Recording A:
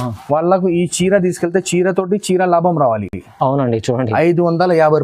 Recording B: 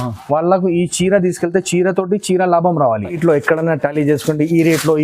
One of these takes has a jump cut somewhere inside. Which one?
B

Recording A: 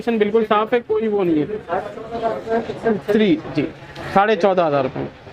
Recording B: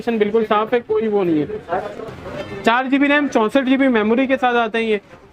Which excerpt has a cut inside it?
B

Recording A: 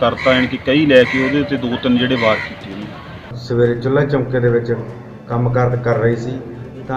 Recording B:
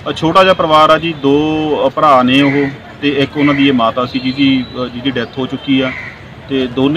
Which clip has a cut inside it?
A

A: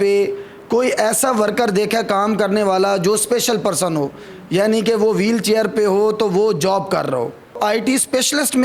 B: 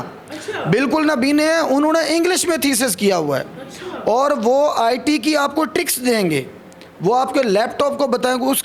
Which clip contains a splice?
A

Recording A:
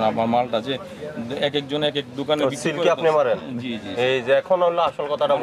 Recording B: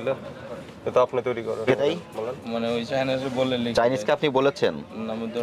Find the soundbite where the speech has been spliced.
B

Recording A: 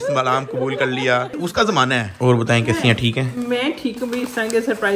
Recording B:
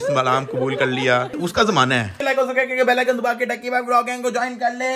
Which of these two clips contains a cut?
B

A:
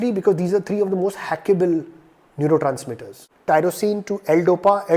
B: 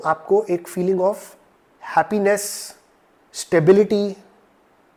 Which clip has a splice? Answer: A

